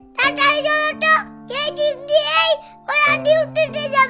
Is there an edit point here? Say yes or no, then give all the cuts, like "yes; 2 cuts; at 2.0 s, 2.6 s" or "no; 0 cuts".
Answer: no; 0 cuts